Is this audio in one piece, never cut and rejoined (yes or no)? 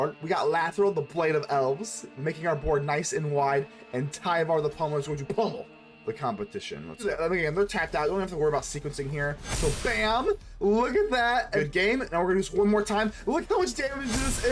no